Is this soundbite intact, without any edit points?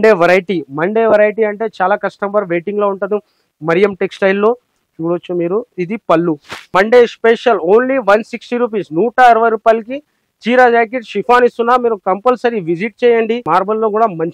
no; 2 cuts; at 6.5 s, 13.4 s

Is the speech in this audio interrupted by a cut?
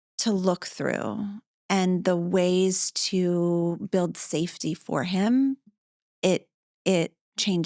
no; 0 cuts

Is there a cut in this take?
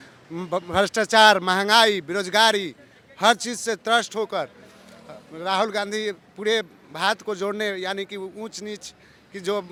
no; 0 cuts

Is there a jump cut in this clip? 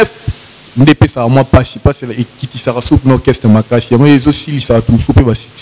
no; 0 cuts

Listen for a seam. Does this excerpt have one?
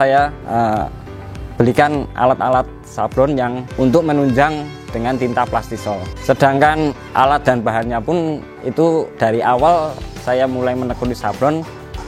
yes; 3 cuts; at 3.6 s, 6.1 s, 9.1 s

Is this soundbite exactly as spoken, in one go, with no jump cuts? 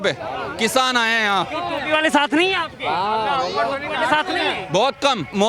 yes; 0 cuts

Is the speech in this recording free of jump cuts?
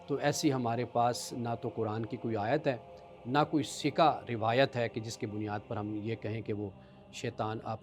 yes; 0 cuts

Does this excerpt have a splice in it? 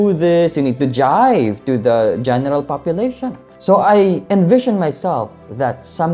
yes; 1 cut; at 3.5 s

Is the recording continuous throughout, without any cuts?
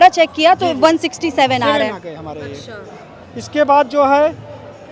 yes; 0 cuts

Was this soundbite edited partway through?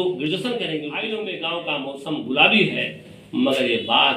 yes; 1 cut; at 0.9 s

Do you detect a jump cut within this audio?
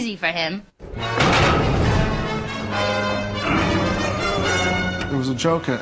no; 0 cuts

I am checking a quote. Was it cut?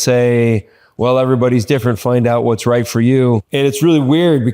yes; 1 cut; at 3.5 s

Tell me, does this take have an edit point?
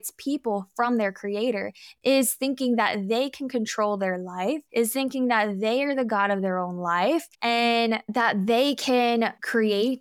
no; 0 cuts

